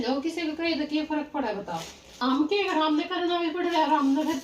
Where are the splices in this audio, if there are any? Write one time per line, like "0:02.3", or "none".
0:02.0